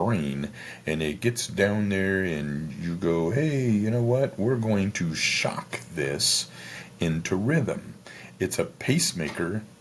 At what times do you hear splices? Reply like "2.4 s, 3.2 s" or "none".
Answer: none